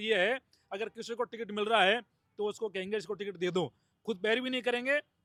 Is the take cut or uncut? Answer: uncut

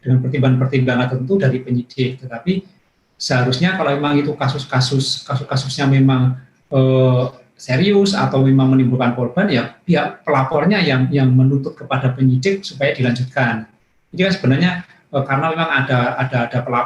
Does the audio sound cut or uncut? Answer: uncut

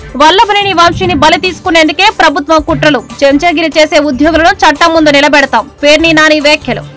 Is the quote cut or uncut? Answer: uncut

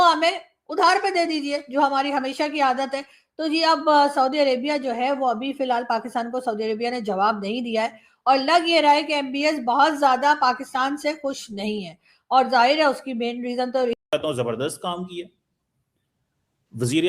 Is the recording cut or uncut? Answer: cut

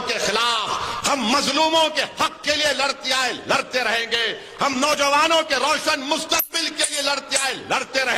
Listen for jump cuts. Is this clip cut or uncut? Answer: uncut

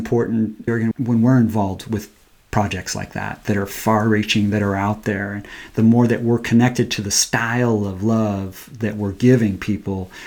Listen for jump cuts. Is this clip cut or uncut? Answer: cut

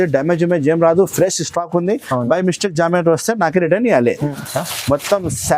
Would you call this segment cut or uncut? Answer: cut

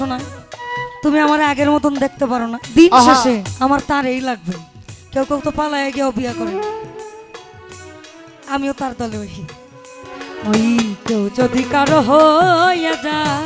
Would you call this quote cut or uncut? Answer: cut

